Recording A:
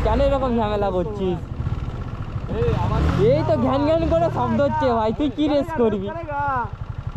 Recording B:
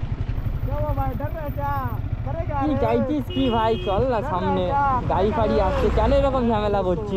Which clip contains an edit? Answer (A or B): A